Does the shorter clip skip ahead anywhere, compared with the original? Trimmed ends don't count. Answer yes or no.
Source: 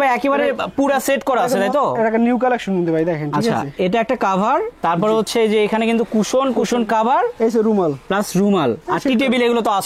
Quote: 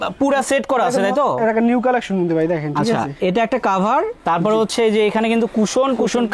no